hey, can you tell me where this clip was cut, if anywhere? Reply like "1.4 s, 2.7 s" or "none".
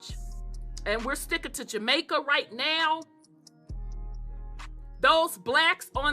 3.1 s, 4.9 s